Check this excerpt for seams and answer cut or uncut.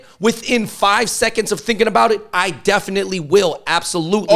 uncut